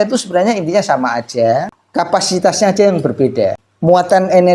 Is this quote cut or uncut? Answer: cut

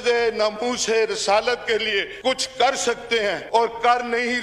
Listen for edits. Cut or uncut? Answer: cut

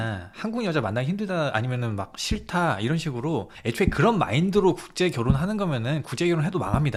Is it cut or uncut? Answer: uncut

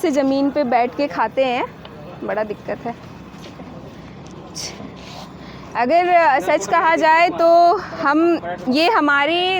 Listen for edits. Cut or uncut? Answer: uncut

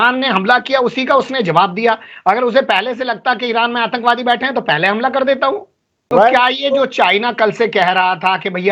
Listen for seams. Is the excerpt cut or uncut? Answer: cut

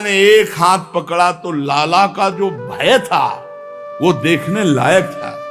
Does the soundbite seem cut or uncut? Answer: uncut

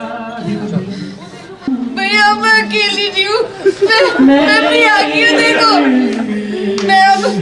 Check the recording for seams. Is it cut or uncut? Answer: cut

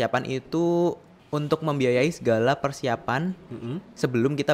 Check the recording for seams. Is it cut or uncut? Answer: cut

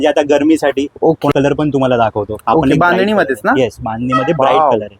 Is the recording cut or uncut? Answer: cut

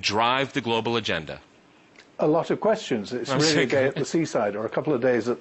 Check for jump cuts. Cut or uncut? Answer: uncut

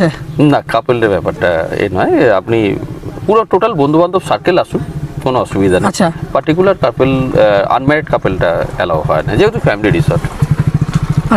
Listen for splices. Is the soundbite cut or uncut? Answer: uncut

